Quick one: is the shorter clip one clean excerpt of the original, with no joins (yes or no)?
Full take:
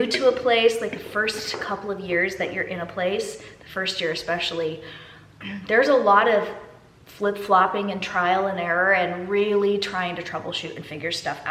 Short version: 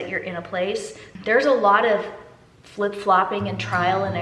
no